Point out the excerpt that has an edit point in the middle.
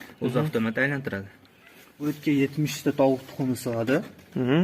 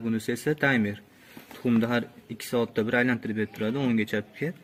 first; 1 cut; at 1.9 s

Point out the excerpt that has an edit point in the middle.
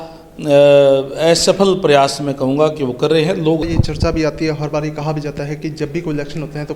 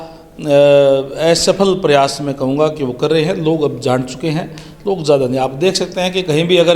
first; 1 cut; at 3.6 s

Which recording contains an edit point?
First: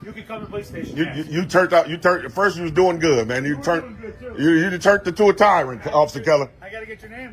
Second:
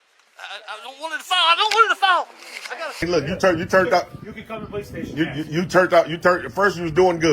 second; 1 cut; at 3.0 s

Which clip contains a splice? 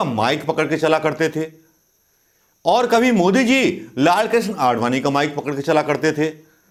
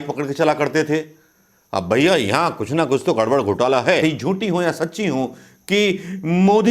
second; 1 cut; at 4.0 s

